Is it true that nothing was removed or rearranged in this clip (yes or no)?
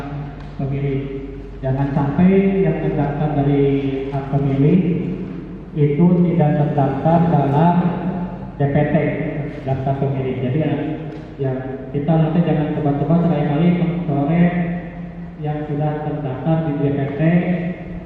yes